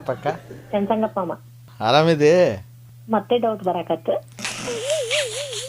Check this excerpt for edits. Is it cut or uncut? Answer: cut